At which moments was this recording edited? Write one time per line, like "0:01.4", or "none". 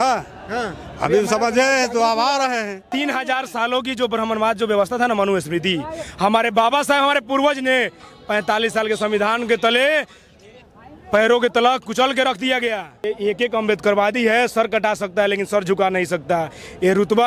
0:02.8
0:13.1